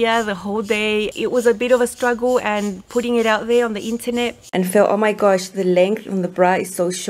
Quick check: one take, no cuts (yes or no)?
no